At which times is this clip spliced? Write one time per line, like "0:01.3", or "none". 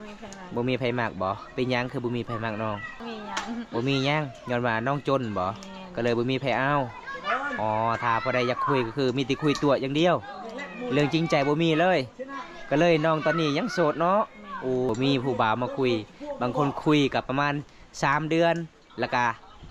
0:03.0
0:14.9